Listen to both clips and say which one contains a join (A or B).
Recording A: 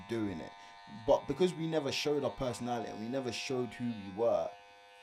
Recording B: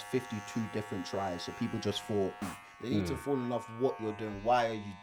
B